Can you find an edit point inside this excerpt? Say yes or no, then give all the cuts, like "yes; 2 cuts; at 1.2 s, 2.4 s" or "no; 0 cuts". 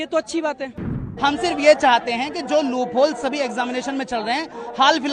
yes; 1 cut; at 1.0 s